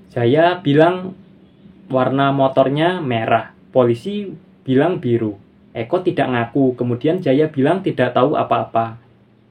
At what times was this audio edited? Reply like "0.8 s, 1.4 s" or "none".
none